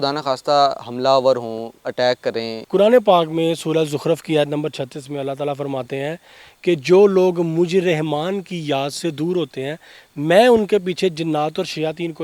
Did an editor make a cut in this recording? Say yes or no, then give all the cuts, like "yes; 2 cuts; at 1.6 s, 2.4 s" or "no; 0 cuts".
yes; 1 cut; at 2.6 s